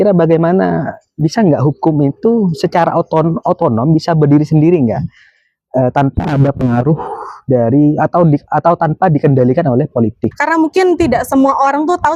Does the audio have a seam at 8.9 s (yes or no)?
no